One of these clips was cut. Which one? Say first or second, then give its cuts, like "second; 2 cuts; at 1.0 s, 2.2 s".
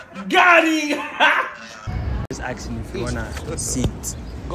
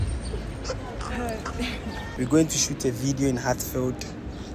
second; 1 cut; at 2.1 s